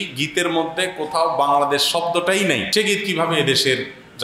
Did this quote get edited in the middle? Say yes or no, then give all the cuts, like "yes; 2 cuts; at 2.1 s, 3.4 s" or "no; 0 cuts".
yes; 1 cut; at 2.7 s